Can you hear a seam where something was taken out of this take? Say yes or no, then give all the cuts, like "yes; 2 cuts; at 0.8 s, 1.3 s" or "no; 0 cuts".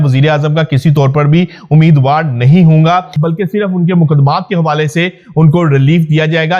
yes; 1 cut; at 3.2 s